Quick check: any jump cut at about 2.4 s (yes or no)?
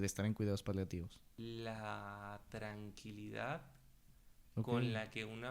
no